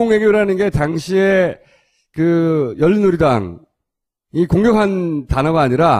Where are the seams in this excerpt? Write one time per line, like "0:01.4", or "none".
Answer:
0:04.7